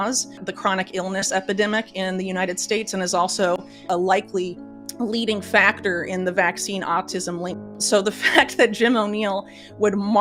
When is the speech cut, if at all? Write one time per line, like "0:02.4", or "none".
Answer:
0:07.8

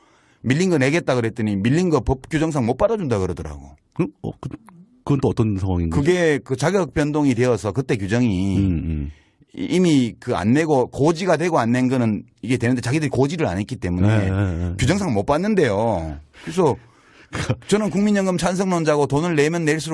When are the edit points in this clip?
0:16.5

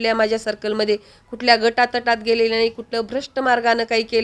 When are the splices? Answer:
none

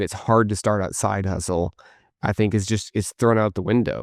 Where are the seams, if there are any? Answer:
none

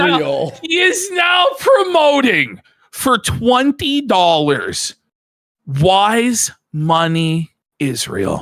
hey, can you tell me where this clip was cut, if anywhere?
none

